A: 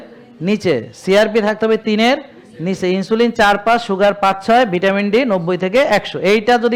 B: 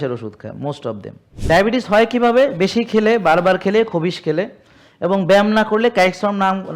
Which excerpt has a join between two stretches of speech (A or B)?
B